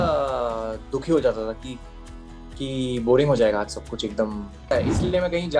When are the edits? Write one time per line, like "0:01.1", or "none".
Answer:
0:04.6